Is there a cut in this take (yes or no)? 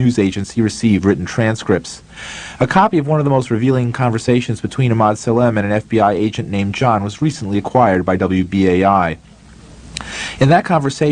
yes